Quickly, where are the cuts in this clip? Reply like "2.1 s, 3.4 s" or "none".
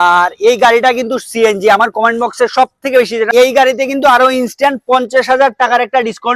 3.3 s